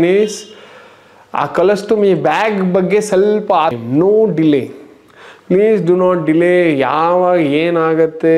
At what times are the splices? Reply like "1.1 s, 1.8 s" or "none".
3.8 s